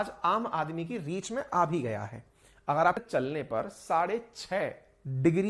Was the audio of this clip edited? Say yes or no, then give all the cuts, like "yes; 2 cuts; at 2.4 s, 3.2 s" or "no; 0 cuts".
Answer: yes; 1 cut; at 3.0 s